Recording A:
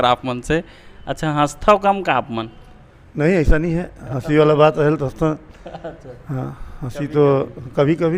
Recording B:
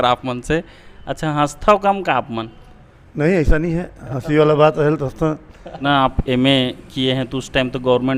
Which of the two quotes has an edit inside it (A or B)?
B